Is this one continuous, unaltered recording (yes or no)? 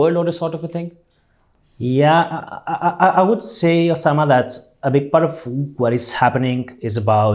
yes